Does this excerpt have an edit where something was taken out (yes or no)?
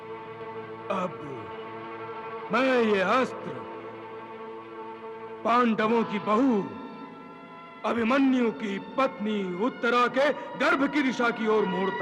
no